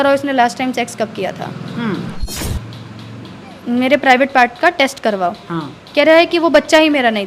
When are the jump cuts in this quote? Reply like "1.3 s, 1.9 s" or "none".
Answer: 2.3 s

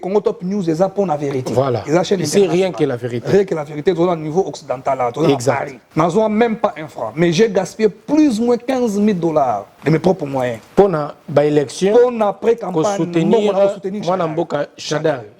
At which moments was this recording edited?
5.8 s, 9.7 s, 10.6 s

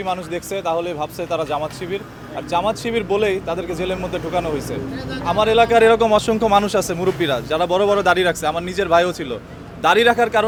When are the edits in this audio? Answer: none

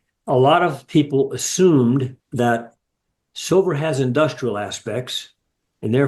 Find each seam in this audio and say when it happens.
2.2 s

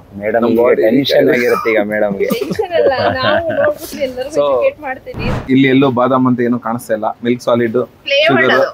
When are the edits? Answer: 5.3 s

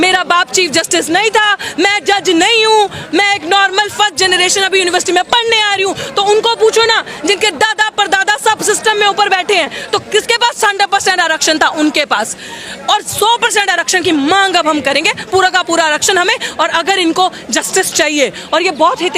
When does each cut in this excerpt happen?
none

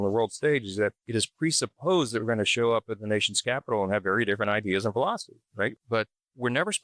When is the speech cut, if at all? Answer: none

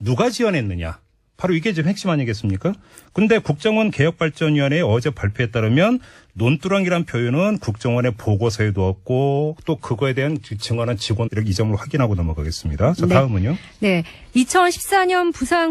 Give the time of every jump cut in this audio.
none

